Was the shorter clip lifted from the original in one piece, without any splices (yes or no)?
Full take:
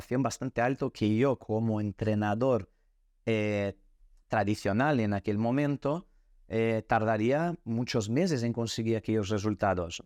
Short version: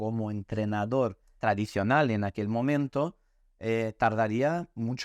no